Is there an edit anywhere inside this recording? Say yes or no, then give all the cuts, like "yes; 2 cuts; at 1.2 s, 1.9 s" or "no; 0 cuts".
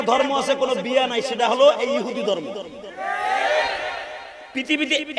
no; 0 cuts